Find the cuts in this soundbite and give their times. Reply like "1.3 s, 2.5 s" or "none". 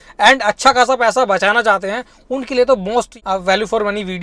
3.1 s